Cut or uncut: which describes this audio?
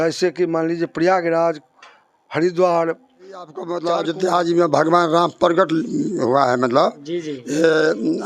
cut